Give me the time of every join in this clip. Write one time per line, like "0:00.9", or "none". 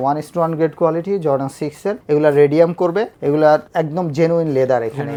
none